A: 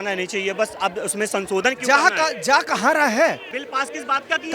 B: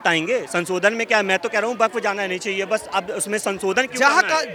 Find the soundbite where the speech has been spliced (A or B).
A